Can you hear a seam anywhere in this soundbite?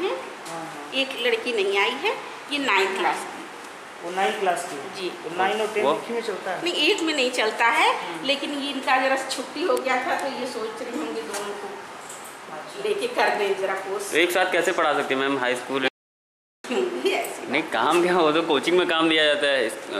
no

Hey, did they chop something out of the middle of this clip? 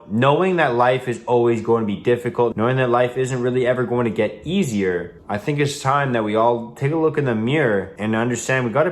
yes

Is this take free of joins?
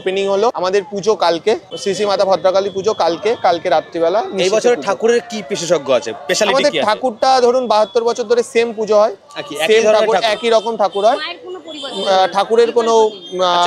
yes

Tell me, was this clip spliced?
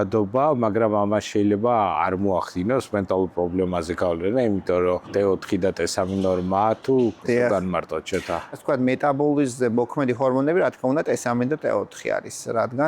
yes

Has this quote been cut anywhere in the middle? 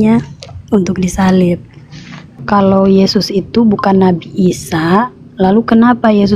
yes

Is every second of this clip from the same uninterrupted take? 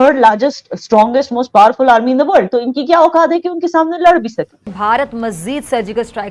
no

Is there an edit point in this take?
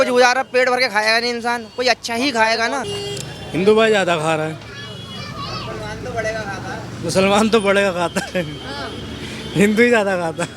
yes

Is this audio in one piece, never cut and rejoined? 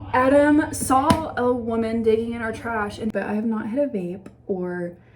no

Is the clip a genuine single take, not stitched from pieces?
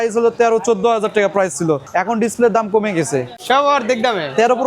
no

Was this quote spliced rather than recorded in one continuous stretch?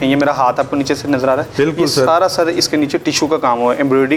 no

